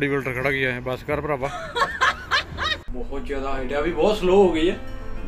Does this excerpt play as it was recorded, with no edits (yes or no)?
no